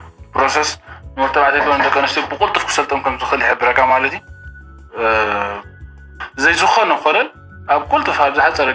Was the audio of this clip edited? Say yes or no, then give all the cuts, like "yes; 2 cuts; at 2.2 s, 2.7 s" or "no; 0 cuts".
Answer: no; 0 cuts